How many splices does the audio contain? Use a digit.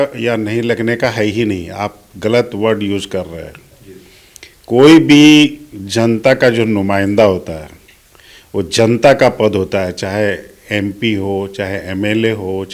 0